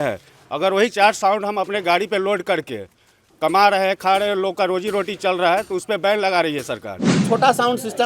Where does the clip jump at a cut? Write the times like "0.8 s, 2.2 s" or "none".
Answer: 7.1 s